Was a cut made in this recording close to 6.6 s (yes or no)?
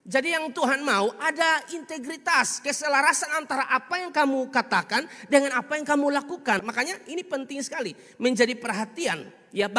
yes